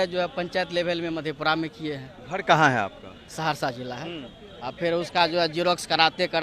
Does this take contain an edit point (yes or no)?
yes